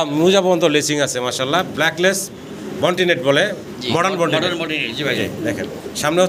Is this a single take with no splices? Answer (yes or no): yes